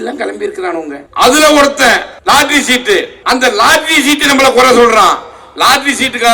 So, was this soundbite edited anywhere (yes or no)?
yes